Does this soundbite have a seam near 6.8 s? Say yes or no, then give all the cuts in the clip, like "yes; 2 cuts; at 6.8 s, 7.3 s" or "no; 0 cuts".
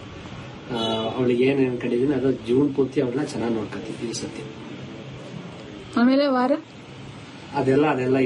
no; 1 cut; at 4.2 s